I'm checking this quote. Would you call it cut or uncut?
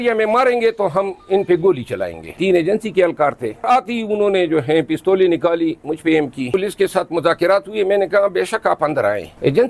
cut